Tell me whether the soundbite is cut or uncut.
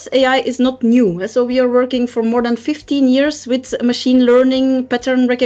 uncut